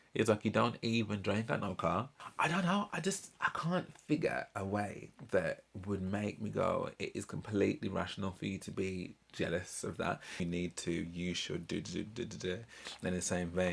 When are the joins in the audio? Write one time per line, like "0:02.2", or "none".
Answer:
0:02.2
0:10.4